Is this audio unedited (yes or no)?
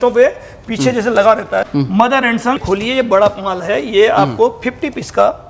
no